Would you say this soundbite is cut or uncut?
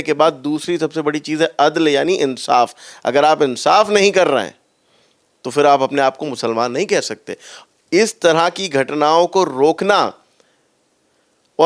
uncut